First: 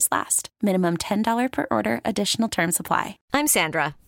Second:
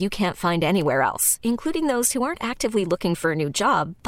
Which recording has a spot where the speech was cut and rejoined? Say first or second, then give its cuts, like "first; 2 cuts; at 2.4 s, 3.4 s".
first; 1 cut; at 3.2 s